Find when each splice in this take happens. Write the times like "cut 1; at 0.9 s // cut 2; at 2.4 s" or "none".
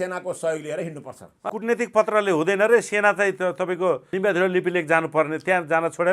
cut 1; at 1.4 s // cut 2; at 4.1 s